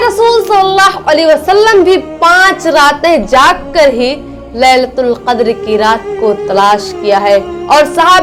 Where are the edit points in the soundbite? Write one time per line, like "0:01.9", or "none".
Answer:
none